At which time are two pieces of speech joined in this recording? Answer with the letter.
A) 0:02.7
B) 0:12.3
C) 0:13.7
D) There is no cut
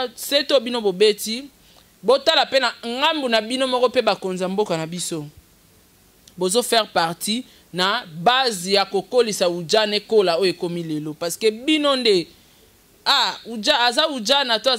D